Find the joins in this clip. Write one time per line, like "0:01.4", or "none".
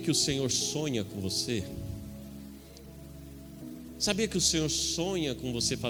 none